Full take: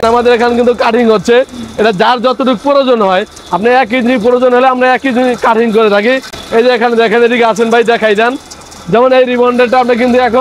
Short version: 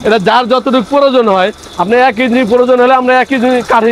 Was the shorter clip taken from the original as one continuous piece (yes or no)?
yes